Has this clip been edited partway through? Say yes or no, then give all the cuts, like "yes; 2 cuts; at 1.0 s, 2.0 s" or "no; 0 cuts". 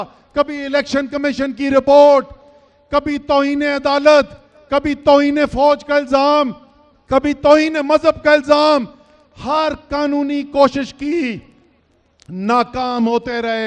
no; 0 cuts